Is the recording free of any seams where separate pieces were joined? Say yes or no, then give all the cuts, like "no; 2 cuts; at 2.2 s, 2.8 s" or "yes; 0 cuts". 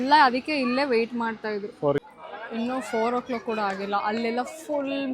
no; 1 cut; at 2.0 s